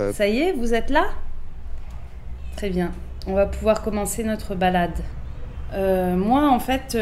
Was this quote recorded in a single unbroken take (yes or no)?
yes